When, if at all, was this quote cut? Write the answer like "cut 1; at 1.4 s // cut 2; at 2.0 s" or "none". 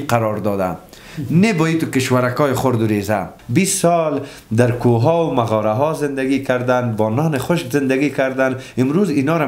cut 1; at 3.4 s

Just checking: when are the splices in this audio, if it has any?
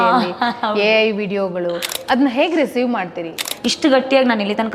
cut 1; at 1.9 s // cut 2; at 3.5 s

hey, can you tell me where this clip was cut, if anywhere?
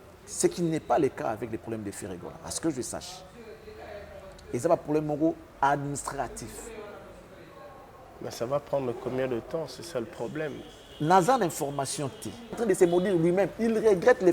cut 1; at 12.6 s

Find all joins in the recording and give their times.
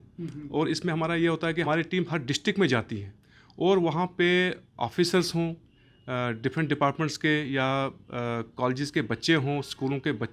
cut 1; at 1.7 s

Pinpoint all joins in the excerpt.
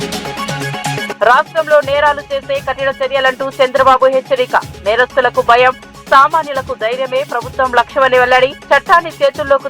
cut 1; at 1.1 s

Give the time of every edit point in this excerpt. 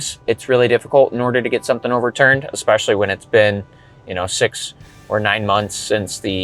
cut 1; at 2.1 s

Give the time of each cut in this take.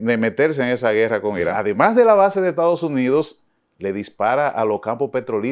cut 1; at 1.5 s

